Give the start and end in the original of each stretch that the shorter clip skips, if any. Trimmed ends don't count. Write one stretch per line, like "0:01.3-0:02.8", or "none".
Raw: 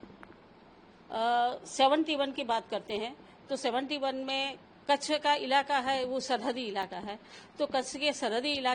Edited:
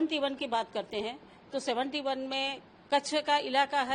none